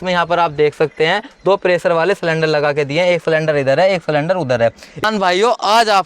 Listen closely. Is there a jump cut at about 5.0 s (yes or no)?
yes